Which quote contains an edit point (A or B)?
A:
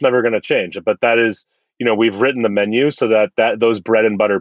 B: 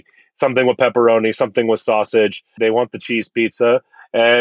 B